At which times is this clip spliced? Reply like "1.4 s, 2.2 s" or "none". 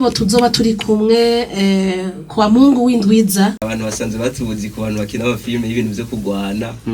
3.6 s